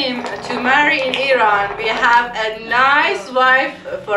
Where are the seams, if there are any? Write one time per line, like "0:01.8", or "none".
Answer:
none